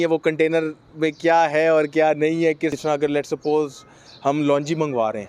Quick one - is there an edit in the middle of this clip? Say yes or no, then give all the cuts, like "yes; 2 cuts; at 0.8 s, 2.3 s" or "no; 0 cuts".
yes; 1 cut; at 2.7 s